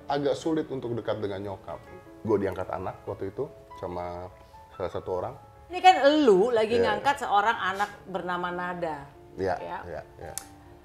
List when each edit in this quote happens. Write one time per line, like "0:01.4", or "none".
0:01.8
0:05.7